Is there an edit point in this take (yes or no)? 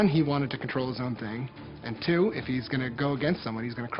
no